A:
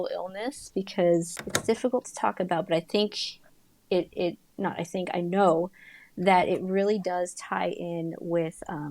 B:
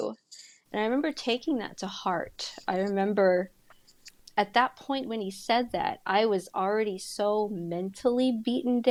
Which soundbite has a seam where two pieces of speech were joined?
A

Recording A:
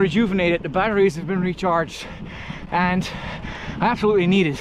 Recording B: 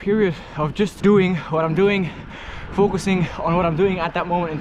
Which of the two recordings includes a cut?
B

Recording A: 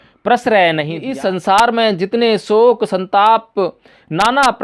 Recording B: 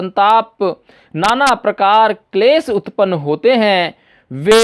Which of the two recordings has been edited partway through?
A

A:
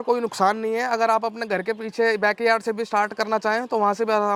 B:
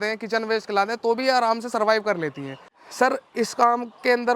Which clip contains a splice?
B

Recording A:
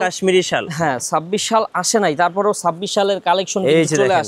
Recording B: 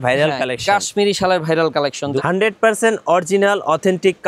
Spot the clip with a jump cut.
B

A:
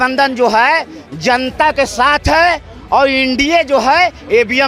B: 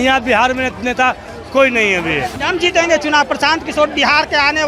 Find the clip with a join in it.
B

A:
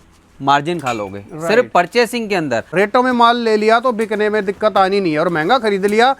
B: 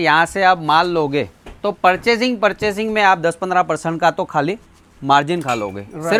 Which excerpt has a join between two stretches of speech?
A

